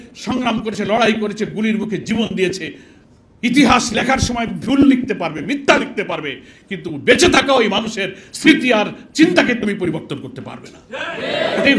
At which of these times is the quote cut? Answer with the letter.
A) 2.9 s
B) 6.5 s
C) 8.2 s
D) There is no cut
D